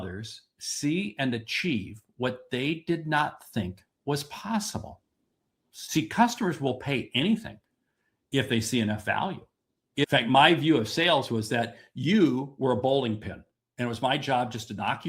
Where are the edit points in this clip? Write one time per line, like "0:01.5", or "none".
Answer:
0:05.7
0:10.0